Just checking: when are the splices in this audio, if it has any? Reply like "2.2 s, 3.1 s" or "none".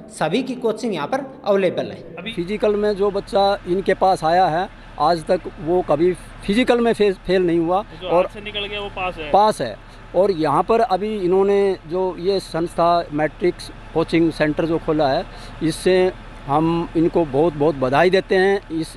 2.3 s